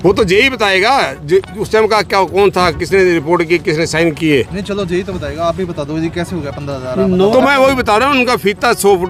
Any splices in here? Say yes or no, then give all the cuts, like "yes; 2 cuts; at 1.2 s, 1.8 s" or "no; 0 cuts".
no; 0 cuts